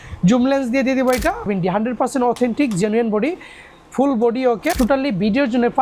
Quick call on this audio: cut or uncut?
cut